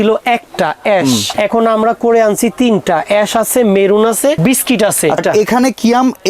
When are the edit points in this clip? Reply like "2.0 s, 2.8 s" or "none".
1.3 s, 4.4 s, 5.2 s